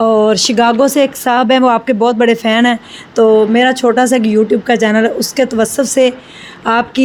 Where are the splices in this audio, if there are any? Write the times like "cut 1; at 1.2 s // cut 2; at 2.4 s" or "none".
none